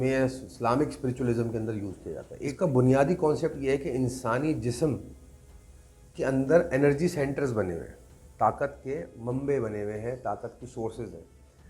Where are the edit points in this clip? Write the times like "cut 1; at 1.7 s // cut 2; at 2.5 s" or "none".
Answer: cut 1; at 2.3 s

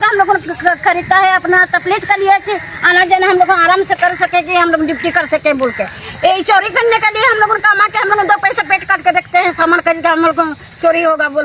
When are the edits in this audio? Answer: none

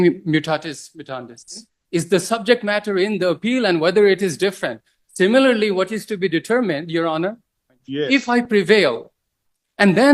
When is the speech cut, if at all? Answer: cut 1; at 1.7 s // cut 2; at 7.8 s

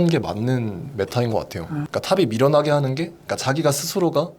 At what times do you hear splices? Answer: cut 1; at 1.9 s

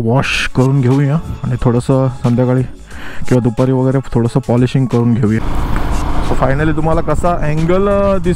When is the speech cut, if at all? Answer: cut 1; at 5.4 s

